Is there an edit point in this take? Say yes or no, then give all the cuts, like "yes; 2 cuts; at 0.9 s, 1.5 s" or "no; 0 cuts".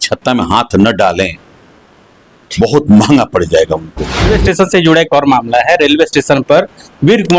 yes; 1 cut; at 4.3 s